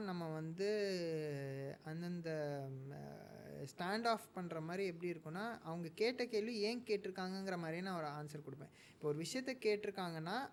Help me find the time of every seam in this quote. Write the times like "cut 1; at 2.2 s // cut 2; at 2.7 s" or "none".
none